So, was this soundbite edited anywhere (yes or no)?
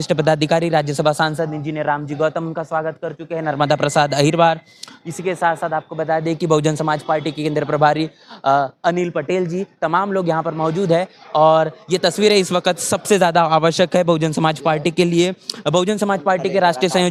no